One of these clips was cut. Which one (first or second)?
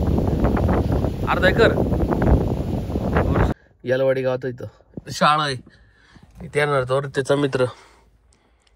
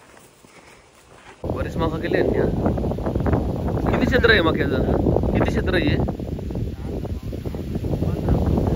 first